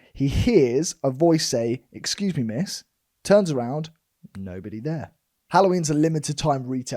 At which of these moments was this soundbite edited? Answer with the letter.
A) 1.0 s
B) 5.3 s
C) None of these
B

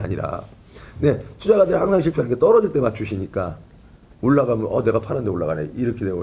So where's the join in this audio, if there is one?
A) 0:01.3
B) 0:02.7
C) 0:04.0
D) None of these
D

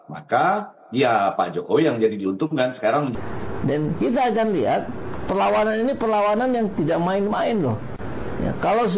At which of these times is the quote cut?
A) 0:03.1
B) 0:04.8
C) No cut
A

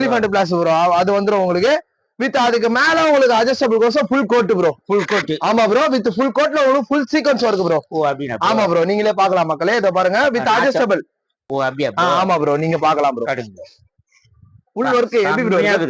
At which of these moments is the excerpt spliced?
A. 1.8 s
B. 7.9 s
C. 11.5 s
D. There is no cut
C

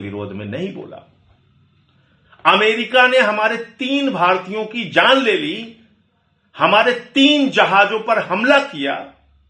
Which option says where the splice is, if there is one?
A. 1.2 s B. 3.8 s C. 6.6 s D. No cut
D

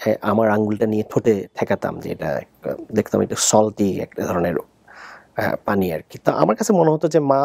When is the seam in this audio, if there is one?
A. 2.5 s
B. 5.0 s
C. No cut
C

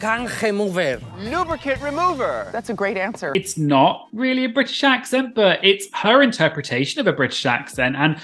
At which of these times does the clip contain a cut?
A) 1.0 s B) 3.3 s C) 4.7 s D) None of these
B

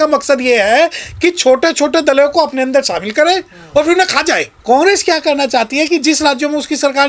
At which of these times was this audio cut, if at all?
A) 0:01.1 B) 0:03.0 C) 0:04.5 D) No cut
C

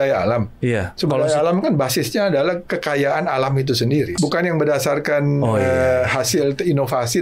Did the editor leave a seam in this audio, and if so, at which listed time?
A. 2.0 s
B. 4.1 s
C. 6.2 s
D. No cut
B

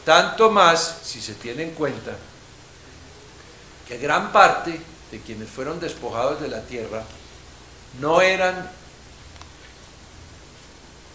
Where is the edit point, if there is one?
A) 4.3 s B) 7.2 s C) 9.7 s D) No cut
B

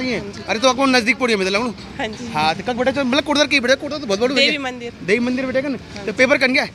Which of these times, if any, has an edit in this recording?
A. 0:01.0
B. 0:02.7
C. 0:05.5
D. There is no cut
D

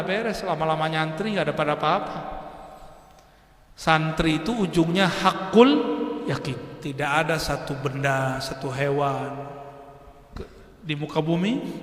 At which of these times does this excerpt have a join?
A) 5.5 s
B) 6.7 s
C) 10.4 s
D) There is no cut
B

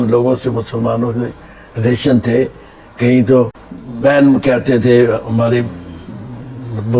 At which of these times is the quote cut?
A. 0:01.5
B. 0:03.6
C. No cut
C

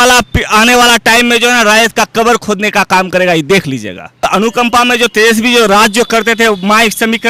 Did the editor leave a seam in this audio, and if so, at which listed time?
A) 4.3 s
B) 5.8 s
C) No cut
A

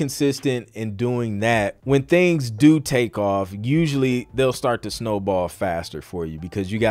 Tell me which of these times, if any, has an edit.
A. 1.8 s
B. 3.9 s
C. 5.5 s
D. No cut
A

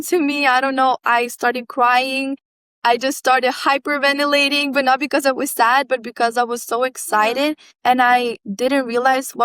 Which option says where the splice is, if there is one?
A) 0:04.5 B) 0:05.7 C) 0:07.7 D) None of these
D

